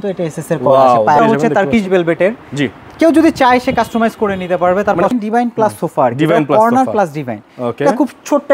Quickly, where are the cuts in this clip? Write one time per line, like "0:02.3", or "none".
0:01.2
0:05.1

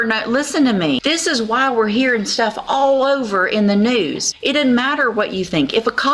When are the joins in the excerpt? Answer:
0:01.0
0:04.3

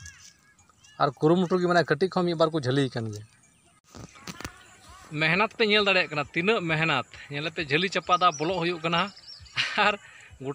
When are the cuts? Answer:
0:03.9

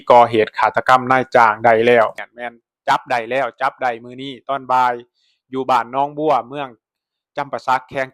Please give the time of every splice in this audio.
0:02.2

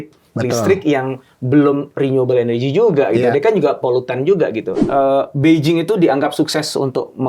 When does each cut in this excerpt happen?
0:04.8

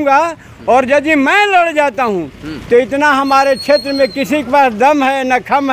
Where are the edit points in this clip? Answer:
none

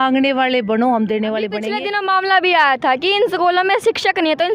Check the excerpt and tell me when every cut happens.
0:01.6

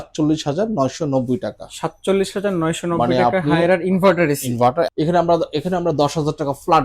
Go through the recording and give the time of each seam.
0:04.9

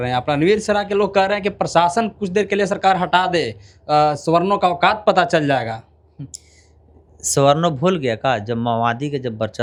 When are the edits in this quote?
none

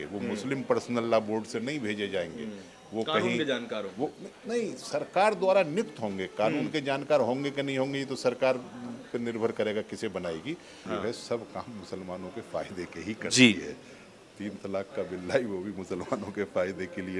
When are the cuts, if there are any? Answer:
0:10.9

